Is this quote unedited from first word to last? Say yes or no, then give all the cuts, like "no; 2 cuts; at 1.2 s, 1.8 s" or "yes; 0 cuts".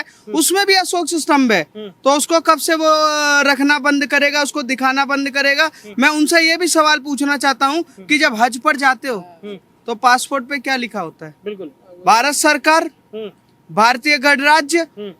yes; 0 cuts